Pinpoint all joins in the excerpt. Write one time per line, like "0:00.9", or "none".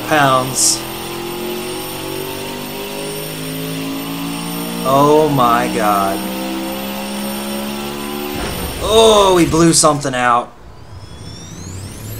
0:10.9